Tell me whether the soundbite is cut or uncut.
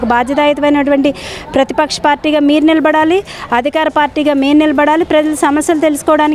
uncut